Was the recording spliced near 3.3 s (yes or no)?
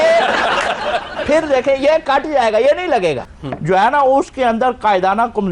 yes